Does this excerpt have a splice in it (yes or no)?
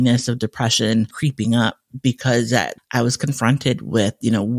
yes